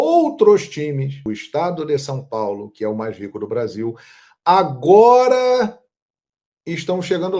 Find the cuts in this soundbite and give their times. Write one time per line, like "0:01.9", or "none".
0:01.2